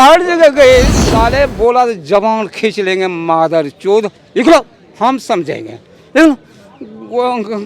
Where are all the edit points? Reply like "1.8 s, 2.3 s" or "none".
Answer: 1.0 s